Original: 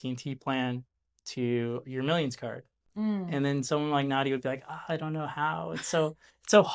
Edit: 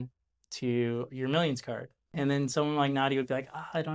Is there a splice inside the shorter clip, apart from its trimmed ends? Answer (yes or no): yes